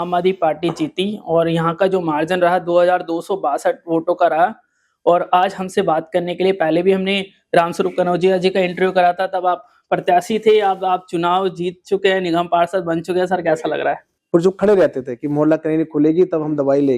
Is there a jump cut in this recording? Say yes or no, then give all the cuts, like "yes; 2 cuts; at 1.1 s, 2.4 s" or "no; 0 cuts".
yes; 1 cut; at 14.1 s